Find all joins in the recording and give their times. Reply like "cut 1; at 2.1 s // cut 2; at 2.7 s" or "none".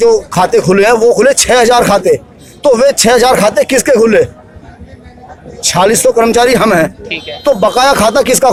none